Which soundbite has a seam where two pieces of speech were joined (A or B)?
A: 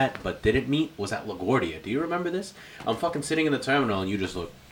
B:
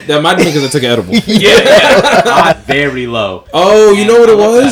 B